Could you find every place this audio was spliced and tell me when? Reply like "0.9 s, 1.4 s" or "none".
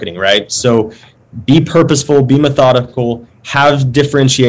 none